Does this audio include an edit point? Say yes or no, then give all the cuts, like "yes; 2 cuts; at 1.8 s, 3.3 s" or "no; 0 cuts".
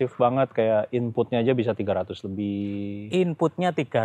no; 0 cuts